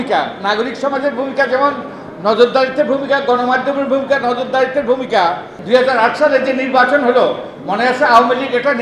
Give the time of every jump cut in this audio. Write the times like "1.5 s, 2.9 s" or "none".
5.5 s